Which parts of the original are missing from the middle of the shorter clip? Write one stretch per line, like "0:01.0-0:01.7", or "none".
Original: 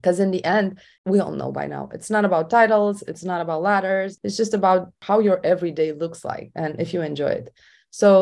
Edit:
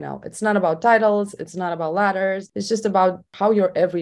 none